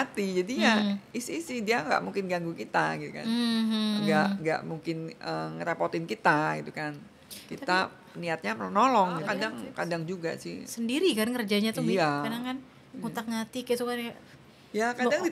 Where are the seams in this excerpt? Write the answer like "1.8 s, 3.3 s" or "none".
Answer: 9.3 s